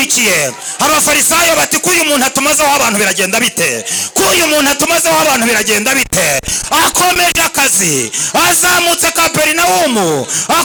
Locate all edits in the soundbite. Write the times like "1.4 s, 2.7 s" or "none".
none